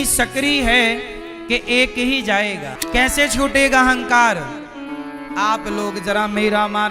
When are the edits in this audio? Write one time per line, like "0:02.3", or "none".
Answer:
0:02.7